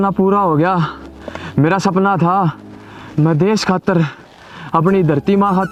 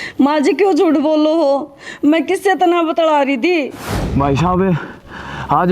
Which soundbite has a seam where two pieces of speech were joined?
second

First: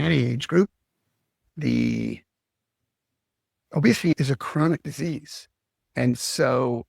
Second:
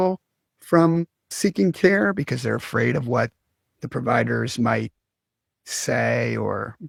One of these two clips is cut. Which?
first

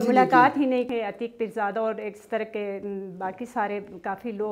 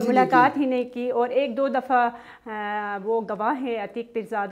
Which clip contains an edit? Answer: first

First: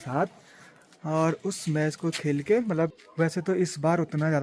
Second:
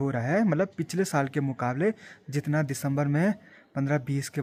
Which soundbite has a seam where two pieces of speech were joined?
first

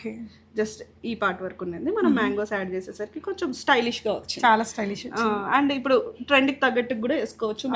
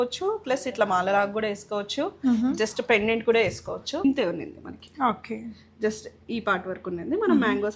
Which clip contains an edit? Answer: second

